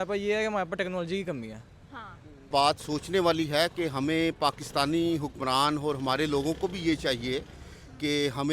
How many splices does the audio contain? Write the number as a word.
one